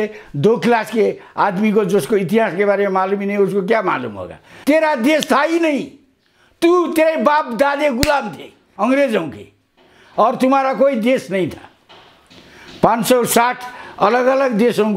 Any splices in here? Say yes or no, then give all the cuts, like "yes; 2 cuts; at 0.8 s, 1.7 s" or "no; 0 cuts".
yes; 1 cut; at 4.4 s